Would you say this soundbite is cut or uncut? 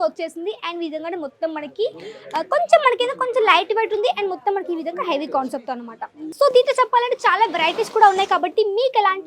cut